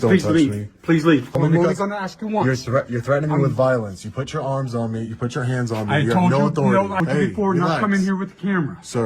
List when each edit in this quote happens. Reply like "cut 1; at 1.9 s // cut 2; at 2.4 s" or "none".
cut 1; at 1.4 s // cut 2; at 7.0 s

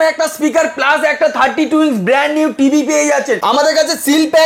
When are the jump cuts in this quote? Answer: cut 1; at 3.4 s

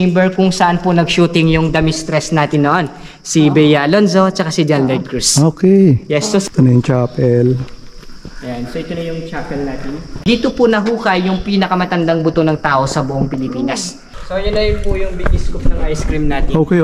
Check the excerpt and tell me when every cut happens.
cut 1; at 6.5 s // cut 2; at 10.1 s // cut 3; at 14.0 s

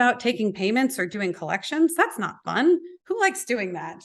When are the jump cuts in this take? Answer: cut 1; at 2.9 s

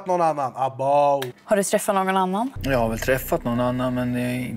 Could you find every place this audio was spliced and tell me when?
cut 1; at 1.3 s // cut 2; at 2.6 s

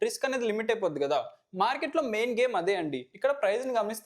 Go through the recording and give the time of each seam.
cut 1; at 3.0 s

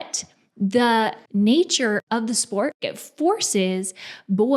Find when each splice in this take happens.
cut 1; at 1.2 s // cut 2; at 2.0 s // cut 3; at 2.9 s

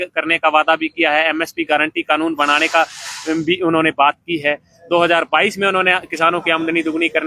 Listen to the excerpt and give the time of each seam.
none

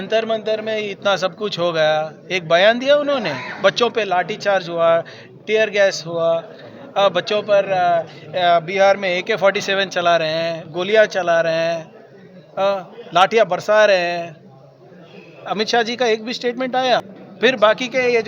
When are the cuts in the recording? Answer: cut 1; at 17.1 s

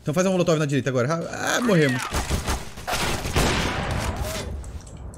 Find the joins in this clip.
none

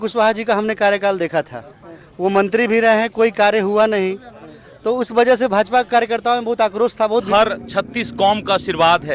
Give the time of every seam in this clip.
cut 1; at 7.3 s

